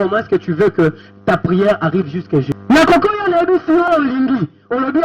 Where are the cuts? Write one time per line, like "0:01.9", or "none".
0:03.9

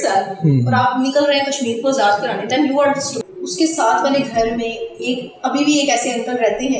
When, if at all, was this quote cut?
0:03.2

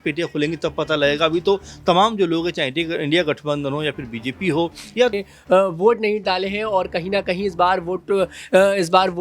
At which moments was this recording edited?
0:05.1

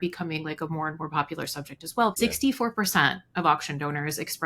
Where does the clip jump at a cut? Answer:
0:02.2

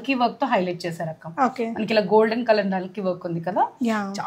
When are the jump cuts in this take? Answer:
none

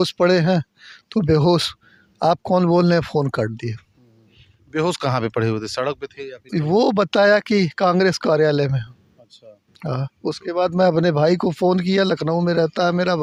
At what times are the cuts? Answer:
none

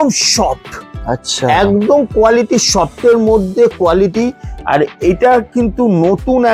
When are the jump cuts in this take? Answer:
none

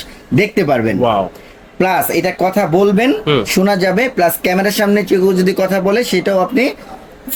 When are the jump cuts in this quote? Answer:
none

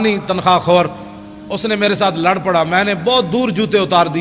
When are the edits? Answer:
none

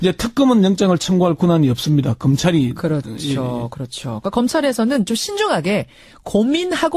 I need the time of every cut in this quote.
none

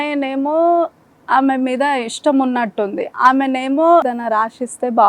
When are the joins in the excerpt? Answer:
0:04.1

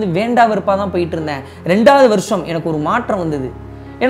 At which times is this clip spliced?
none

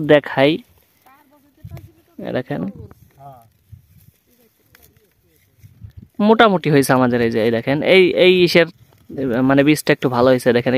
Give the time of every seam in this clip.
none

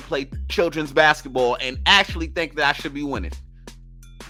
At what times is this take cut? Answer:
none

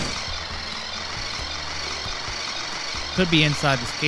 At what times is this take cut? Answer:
0:02.5

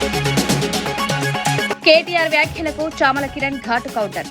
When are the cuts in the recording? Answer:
0:01.7

